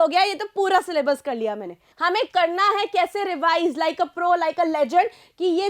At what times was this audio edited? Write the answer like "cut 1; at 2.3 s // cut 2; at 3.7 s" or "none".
cut 1; at 1.9 s